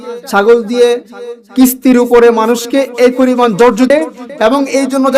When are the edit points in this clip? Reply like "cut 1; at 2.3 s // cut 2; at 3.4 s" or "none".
cut 1; at 3.9 s